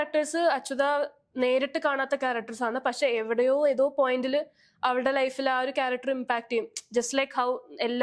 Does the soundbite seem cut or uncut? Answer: uncut